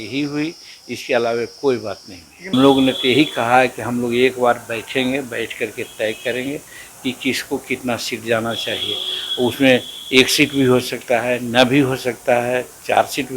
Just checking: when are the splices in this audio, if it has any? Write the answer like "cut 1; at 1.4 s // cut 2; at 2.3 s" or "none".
cut 1; at 2.5 s